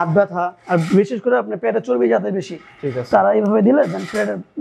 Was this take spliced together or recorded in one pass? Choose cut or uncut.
uncut